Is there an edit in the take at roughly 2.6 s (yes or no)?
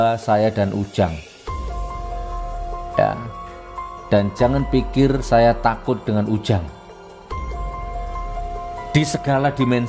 yes